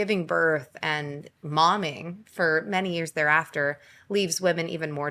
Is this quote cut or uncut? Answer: uncut